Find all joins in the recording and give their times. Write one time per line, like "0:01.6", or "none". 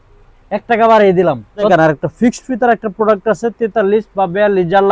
0:01.7